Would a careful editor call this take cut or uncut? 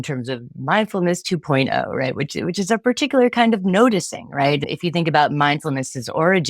cut